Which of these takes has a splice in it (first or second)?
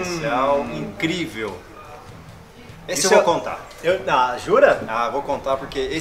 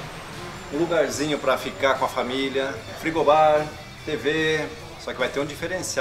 second